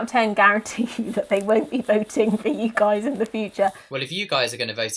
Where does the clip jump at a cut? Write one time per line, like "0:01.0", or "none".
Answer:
0:03.8